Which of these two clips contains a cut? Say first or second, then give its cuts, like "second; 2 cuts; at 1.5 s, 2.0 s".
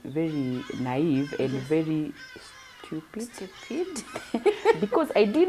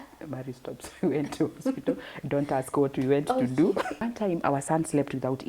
second; 1 cut; at 4.0 s